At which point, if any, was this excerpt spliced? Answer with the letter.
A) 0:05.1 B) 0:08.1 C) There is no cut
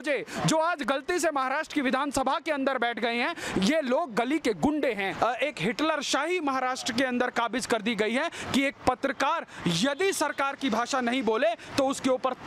A